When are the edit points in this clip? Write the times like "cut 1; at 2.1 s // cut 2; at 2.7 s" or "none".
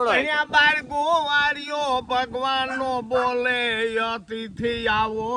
none